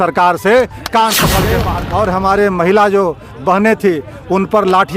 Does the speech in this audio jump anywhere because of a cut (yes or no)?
yes